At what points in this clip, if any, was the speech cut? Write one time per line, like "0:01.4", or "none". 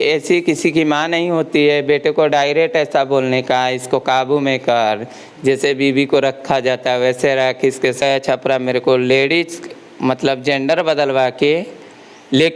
0:08.3